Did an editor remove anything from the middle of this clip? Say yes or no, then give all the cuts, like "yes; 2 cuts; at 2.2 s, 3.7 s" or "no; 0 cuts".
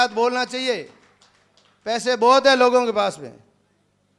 no; 0 cuts